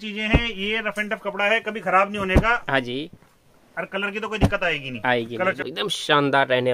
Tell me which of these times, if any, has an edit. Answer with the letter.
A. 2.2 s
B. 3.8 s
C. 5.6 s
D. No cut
C